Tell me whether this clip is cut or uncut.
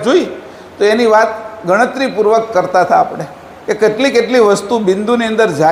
uncut